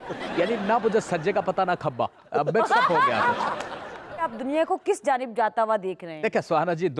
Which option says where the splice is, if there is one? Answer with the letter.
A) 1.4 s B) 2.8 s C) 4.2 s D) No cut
C